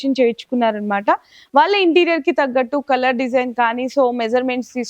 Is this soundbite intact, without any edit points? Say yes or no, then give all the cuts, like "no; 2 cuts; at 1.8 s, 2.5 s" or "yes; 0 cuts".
yes; 0 cuts